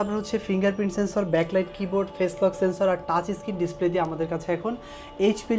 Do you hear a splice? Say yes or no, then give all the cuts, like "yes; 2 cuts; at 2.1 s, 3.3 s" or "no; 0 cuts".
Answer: no; 0 cuts